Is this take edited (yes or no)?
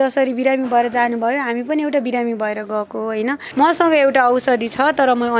yes